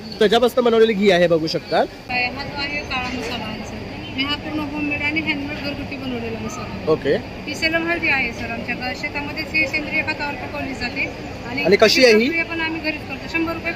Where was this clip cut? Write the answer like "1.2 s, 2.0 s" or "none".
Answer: 2.0 s